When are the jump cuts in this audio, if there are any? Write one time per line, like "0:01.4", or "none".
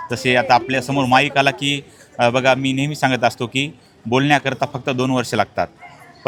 none